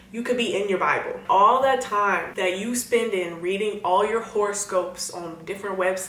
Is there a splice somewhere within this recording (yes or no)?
yes